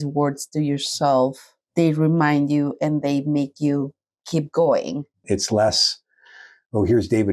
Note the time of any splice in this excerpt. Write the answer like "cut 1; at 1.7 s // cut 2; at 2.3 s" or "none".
cut 1; at 5.1 s